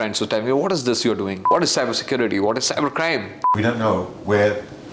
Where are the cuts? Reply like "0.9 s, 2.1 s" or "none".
1.4 s, 3.4 s